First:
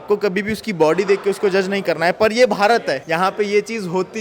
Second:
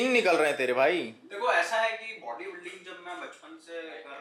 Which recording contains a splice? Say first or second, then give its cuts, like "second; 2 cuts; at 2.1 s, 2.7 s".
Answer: first; 1 cut; at 3.0 s